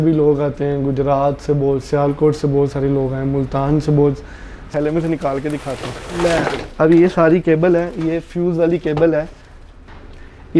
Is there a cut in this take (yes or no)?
yes